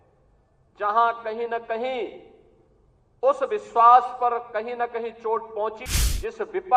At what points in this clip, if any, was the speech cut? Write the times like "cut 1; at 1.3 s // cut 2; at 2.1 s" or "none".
cut 1; at 5.8 s